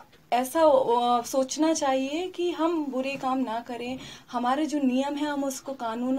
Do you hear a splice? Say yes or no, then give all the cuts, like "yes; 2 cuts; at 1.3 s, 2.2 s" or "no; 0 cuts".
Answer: no; 0 cuts